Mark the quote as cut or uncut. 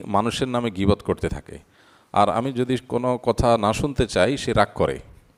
uncut